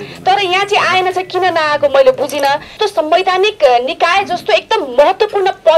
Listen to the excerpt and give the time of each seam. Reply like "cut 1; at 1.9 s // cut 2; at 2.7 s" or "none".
cut 1; at 2.7 s